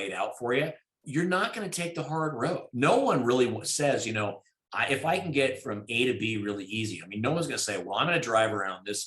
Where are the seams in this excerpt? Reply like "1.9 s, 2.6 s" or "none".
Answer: 1.0 s, 2.7 s

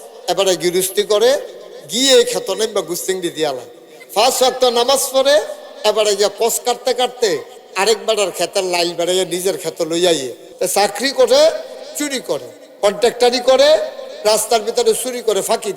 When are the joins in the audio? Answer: 10.4 s

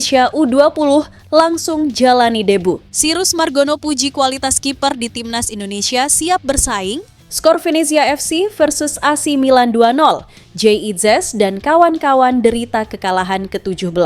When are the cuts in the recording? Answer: 2.9 s, 7.2 s

